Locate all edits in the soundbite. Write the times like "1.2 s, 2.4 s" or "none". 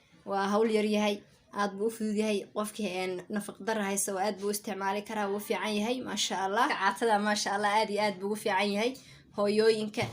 6.8 s